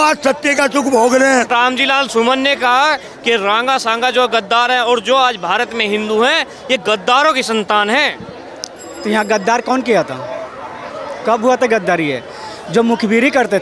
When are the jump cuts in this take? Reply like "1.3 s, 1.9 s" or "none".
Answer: none